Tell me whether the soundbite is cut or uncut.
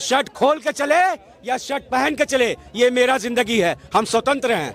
uncut